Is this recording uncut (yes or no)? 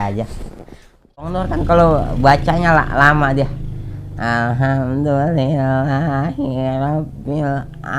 no